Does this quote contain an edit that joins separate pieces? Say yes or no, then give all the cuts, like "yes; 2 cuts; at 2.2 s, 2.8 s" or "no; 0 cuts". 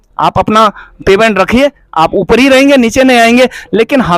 no; 0 cuts